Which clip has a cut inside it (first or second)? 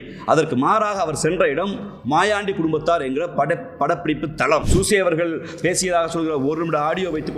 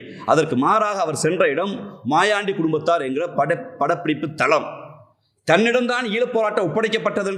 first